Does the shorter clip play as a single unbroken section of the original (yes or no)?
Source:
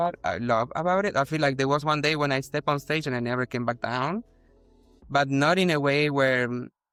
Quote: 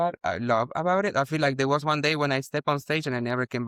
yes